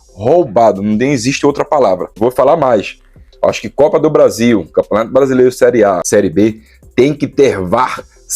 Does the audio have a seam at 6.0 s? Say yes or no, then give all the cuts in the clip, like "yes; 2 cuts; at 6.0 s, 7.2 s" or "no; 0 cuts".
yes; 2 cuts; at 2.1 s, 6.0 s